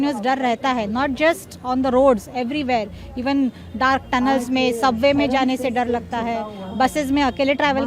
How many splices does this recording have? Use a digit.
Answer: 0